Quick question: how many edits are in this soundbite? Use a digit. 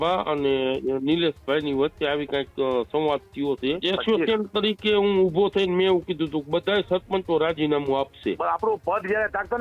2